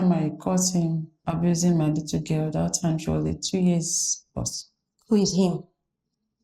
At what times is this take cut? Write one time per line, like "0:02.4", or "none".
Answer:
0:01.1